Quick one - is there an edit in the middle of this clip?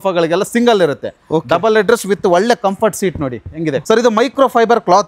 yes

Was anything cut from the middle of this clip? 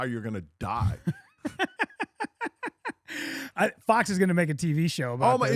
no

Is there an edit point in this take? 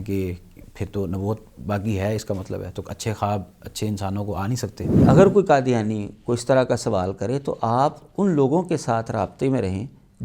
yes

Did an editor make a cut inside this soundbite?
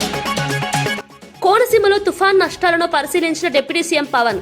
yes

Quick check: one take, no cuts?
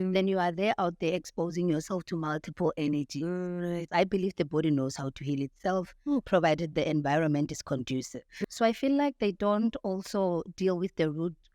no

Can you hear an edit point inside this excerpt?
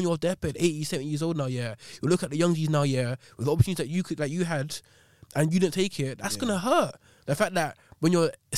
no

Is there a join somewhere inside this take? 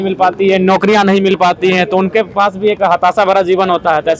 no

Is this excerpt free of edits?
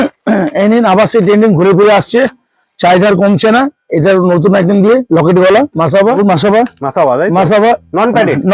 no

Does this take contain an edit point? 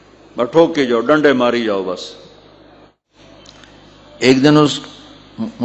yes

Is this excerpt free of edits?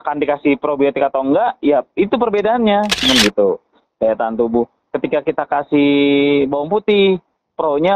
no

